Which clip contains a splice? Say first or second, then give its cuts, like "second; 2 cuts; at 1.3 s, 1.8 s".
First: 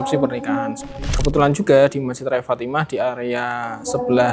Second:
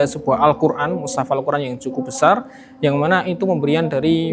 first; 1 cut; at 1.1 s